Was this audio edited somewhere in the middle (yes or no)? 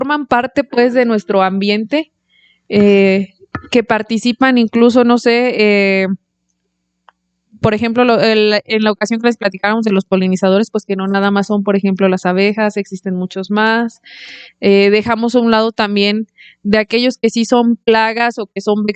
no